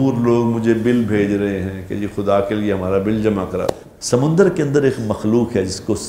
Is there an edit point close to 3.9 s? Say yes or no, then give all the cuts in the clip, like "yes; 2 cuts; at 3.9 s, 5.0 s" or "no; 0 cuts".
yes; 1 cut; at 3.9 s